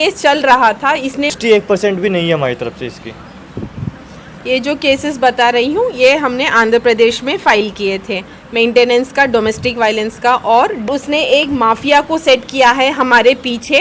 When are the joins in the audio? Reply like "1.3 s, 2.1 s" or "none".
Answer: 1.3 s, 10.9 s